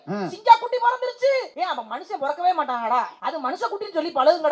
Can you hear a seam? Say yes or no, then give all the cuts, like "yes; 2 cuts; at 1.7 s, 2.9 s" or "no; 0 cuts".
yes; 2 cuts; at 1.5 s, 3.2 s